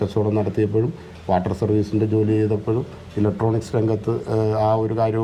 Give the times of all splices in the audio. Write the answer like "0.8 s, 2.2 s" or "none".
none